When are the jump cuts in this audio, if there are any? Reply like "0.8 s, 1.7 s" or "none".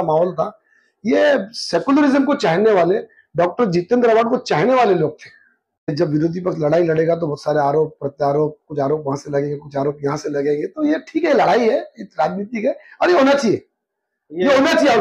5.9 s